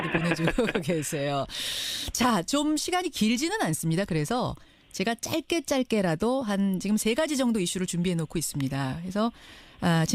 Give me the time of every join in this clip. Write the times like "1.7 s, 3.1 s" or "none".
none

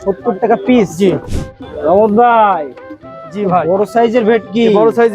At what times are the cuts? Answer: 1.3 s

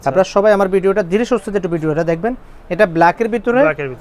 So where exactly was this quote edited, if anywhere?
none

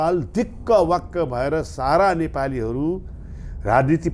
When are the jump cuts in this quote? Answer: none

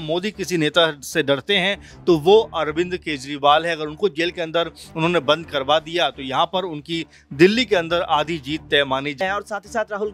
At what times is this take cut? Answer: 9.2 s

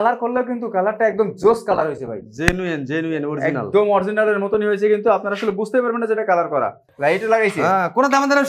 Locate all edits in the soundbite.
6.8 s

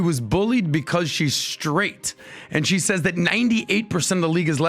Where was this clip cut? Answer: none

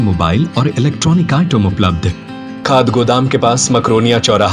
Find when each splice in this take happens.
2.6 s

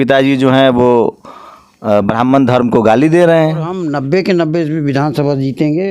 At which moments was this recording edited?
3.8 s

